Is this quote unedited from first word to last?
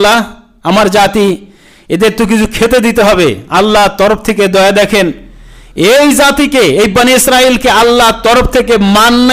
yes; 0 cuts

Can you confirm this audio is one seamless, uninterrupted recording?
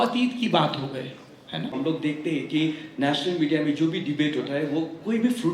no; 1 cut; at 1.7 s

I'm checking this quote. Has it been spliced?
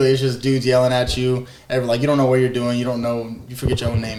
no; 0 cuts

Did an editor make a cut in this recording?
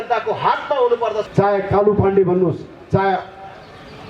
yes; 1 cut; at 1.2 s

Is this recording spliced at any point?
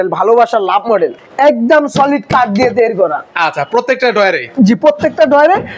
yes; 1 cut; at 1.2 s

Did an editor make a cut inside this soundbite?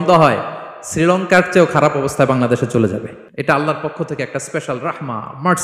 yes; 1 cut; at 3.2 s

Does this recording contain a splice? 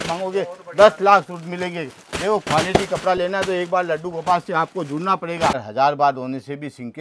yes; 1 cut; at 5.6 s

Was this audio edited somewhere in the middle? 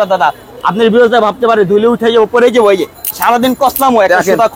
no; 0 cuts

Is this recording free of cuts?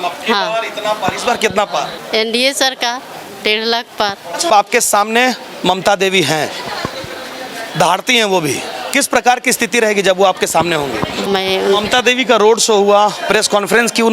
no; 3 cuts; at 2.0 s, 4.5 s, 11.3 s

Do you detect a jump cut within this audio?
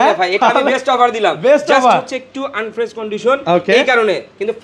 no; 0 cuts

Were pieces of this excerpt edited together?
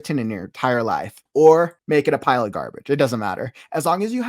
yes; 2 cuts; at 1.2 s, 1.8 s

